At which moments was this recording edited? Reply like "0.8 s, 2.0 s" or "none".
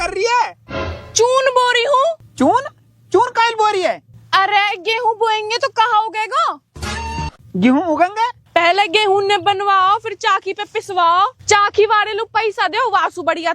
2.2 s, 8.4 s